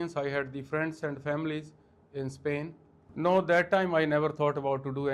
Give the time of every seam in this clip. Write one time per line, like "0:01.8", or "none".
0:03.1